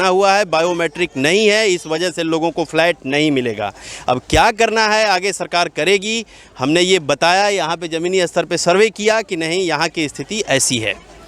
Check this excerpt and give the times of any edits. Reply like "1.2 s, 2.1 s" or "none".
none

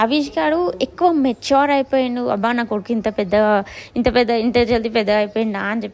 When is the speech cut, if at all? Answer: none

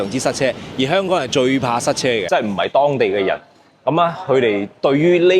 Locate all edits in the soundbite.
2.2 s

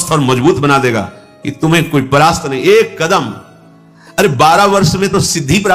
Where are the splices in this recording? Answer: none

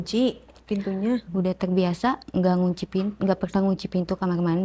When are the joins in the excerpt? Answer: 1.2 s

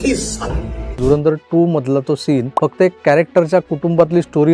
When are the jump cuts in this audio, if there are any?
1.0 s, 2.5 s

